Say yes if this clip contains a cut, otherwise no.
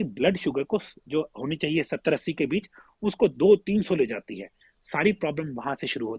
no